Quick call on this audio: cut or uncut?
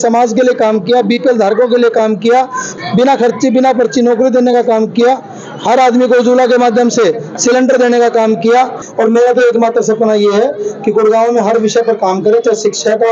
cut